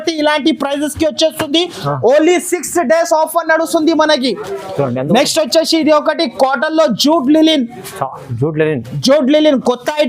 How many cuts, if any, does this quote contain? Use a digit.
0